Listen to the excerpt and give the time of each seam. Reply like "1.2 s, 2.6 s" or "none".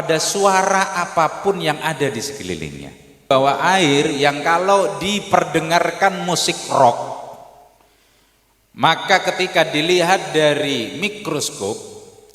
3.3 s

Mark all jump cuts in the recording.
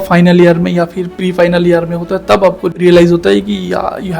2.7 s

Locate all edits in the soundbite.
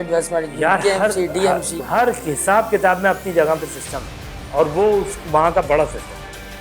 1.8 s

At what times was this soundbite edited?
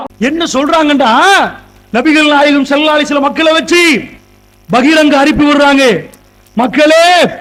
none

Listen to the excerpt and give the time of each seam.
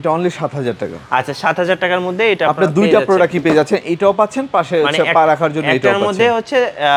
none

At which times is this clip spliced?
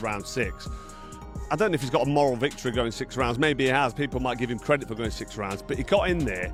none

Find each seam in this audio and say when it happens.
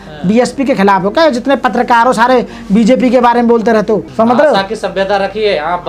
4.1 s

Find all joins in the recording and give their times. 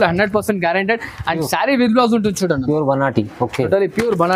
none

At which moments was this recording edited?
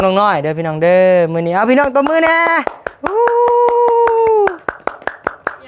none

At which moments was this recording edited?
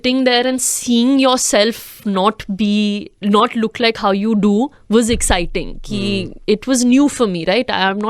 none

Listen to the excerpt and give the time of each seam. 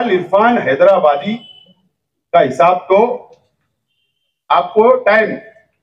none

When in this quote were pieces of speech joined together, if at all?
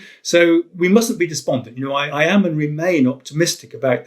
2.1 s

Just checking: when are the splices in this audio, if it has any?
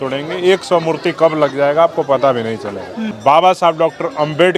none

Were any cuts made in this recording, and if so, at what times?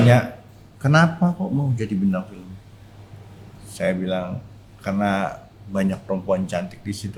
none

